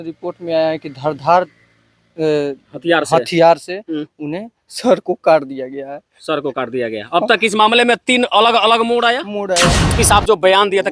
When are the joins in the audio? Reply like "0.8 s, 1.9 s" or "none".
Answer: 9.9 s